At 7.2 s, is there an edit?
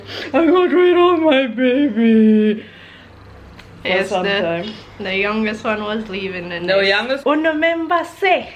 yes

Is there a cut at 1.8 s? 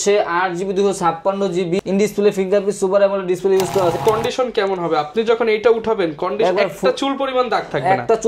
yes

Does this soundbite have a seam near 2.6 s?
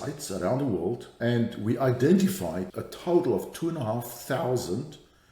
yes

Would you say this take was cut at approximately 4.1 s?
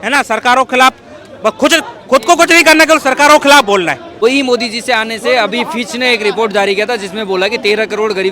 yes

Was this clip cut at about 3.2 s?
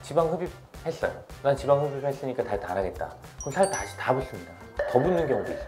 no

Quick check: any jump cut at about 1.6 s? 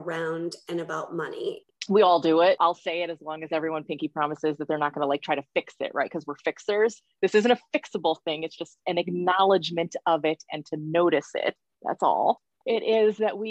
yes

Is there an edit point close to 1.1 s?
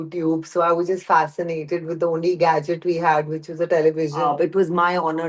no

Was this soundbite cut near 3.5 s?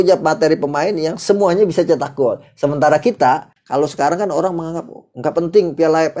yes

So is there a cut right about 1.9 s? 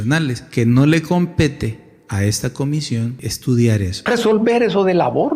no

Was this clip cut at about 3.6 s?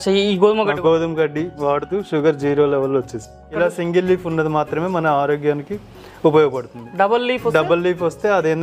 yes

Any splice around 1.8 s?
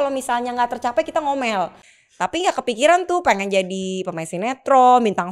yes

